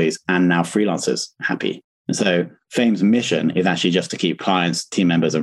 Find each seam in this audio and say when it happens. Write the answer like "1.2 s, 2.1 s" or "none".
2.7 s